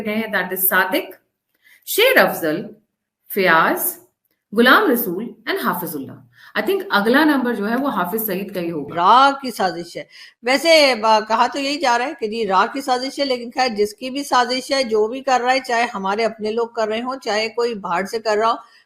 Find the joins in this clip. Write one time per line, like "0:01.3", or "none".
0:08.9